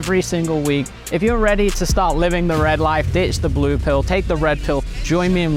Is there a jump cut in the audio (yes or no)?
no